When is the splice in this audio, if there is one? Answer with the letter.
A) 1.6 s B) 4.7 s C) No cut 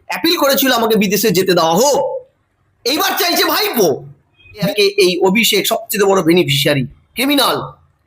B